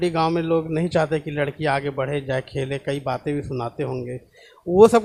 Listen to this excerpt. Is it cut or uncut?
uncut